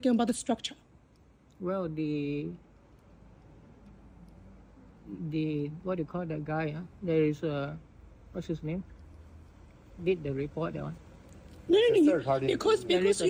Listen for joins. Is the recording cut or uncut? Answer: uncut